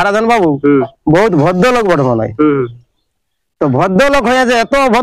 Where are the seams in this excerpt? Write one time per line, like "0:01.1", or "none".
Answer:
none